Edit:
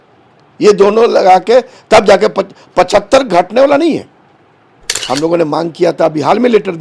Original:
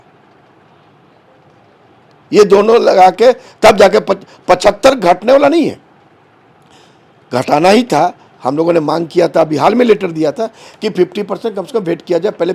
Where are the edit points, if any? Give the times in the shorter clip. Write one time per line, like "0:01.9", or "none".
0:04.9